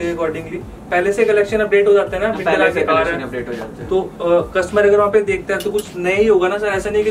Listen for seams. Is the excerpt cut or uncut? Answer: uncut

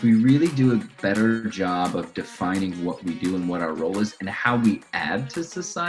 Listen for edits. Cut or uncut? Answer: cut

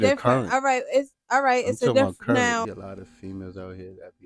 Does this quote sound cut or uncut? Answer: cut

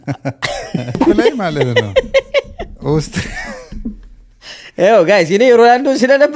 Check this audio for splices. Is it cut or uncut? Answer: cut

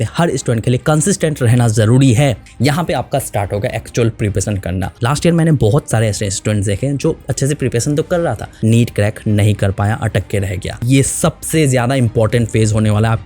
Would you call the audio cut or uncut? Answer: cut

